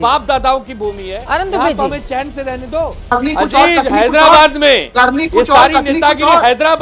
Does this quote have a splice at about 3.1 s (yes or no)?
yes